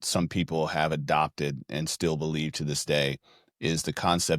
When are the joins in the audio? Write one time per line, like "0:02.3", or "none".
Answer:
none